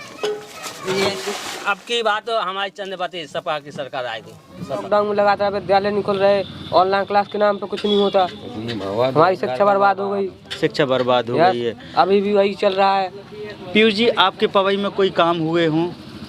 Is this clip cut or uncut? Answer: cut